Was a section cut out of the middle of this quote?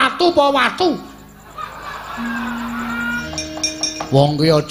yes; 1 cut; at 3.1 s

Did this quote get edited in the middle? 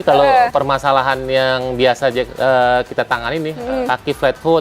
yes; 1 cut; at 3.6 s

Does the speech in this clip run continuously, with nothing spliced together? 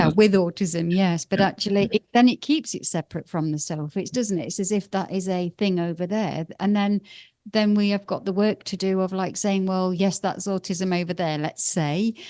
yes; 0 cuts

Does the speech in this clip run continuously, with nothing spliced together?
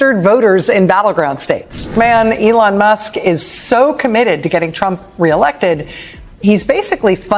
no; 1 cut; at 1.7 s

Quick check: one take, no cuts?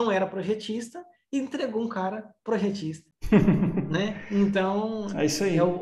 yes; 0 cuts

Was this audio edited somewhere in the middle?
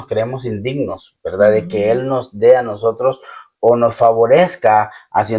no; 0 cuts

